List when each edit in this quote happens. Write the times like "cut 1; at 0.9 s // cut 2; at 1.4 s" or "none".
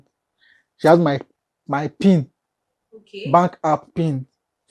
none